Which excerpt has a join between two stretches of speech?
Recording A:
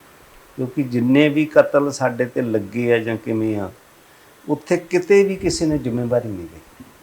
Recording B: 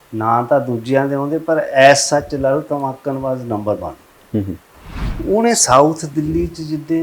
B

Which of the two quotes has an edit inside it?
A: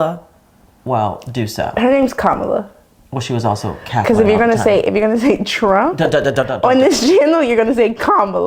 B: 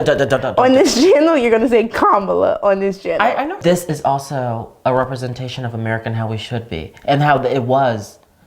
B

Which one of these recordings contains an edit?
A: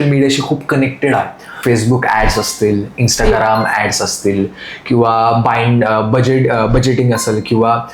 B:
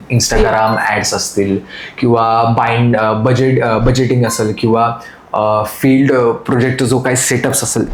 A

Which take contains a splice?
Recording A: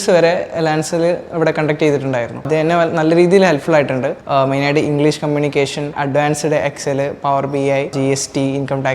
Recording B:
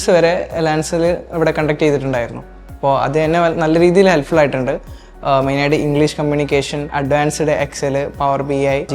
A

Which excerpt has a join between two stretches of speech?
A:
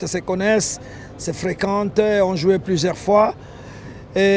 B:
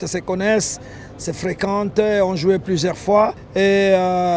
B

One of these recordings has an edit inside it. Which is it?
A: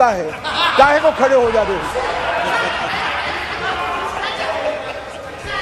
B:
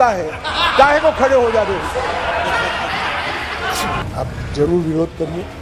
B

